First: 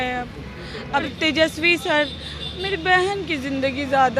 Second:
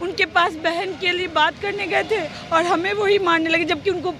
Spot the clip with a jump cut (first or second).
first